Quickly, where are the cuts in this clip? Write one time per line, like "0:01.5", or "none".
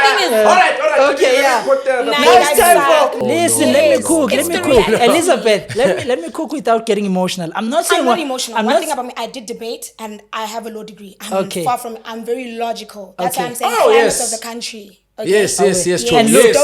0:03.2

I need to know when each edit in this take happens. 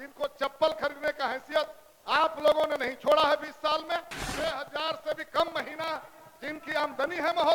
0:04.2

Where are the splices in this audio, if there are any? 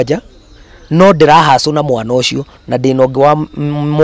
none

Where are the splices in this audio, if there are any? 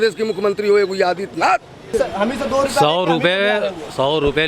0:01.9

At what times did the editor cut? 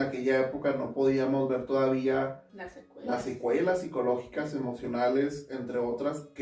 none

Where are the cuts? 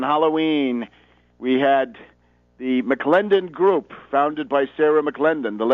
0:02.5

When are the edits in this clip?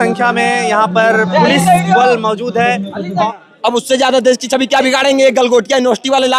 0:03.3

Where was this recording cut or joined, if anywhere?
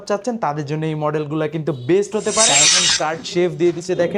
0:02.7

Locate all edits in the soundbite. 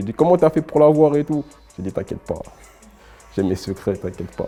none

